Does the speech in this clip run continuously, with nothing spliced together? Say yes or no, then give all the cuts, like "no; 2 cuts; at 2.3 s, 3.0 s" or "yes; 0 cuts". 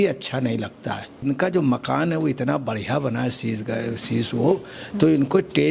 no; 1 cut; at 1.2 s